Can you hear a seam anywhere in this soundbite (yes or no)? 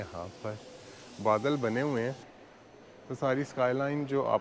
yes